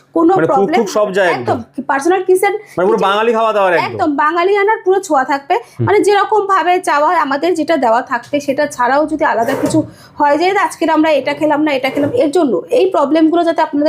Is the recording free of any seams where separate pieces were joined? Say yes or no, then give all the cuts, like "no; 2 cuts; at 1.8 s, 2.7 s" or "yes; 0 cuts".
yes; 0 cuts